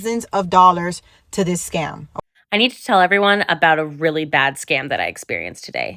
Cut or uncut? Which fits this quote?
cut